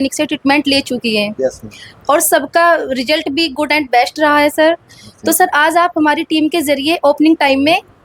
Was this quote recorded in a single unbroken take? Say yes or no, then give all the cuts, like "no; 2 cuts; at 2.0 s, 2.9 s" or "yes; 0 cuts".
yes; 0 cuts